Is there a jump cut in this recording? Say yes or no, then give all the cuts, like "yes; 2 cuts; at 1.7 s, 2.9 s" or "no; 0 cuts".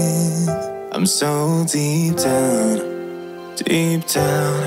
no; 0 cuts